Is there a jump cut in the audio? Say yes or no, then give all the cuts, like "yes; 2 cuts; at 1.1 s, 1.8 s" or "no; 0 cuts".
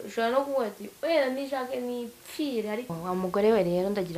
yes; 1 cut; at 2.9 s